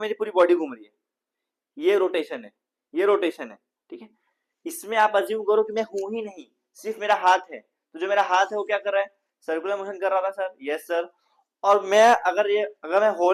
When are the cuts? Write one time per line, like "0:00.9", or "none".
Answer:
none